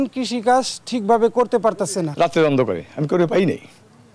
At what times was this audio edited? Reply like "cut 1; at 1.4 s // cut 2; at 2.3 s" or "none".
cut 1; at 2.1 s